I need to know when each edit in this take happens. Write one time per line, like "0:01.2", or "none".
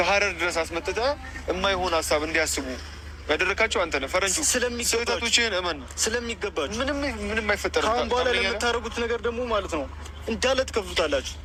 none